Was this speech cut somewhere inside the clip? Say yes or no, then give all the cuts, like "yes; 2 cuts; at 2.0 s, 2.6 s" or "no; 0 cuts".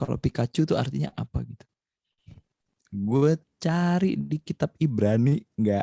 no; 0 cuts